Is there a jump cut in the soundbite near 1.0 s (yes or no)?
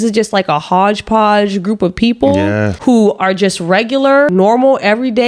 no